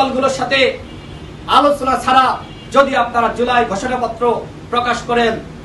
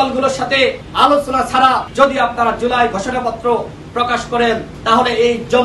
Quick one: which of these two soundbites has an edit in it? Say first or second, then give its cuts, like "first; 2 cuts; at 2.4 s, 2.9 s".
second; 3 cuts; at 0.8 s, 1.9 s, 4.7 s